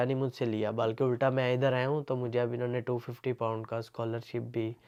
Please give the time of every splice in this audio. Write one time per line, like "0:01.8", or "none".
none